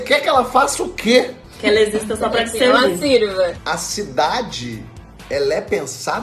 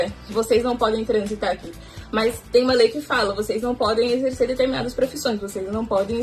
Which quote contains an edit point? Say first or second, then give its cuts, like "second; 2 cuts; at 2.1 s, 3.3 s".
first; 2 cuts; at 1.4 s, 3.6 s